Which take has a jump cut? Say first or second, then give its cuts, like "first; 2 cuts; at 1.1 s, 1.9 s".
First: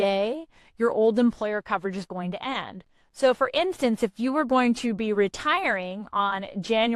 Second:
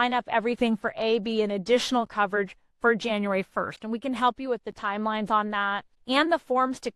second; 1 cut; at 5.9 s